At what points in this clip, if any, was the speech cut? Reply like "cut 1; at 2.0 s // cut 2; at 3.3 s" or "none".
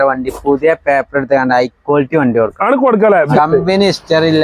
cut 1; at 3.3 s